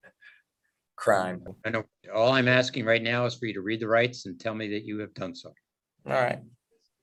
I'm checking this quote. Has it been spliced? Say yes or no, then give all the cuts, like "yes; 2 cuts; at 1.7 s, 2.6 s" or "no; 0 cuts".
no; 0 cuts